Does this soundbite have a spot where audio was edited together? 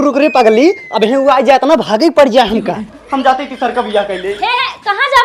yes; 1 cut; at 3.0 s

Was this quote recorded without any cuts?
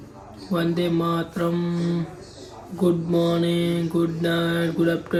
yes; 0 cuts

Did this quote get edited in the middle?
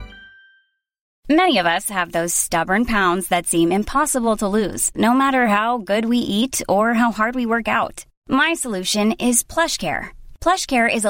yes; 1 cut; at 1.1 s

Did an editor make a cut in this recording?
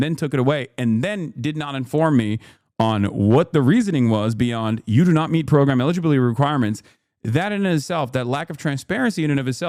no; 0 cuts

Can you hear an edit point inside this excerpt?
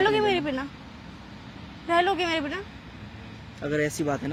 no; 0 cuts

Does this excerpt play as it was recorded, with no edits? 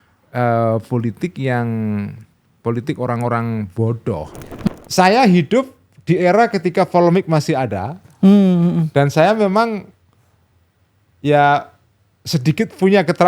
no; 1 cut; at 4.7 s

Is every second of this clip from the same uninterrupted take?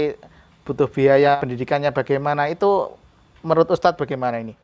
no; 1 cut; at 1.3 s

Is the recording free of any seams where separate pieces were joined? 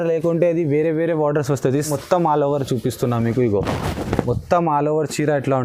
no; 1 cut; at 1.8 s

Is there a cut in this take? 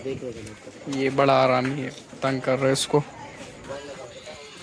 yes; 1 cut; at 3.6 s

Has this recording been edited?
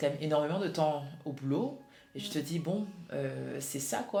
no; 0 cuts

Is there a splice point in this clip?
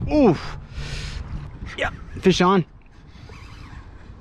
yes; 1 cut; at 1.5 s

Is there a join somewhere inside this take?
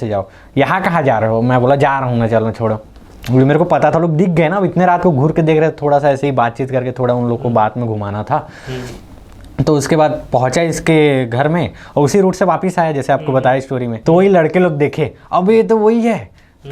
no; 0 cuts

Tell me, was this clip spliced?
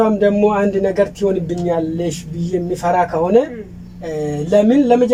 no; 0 cuts

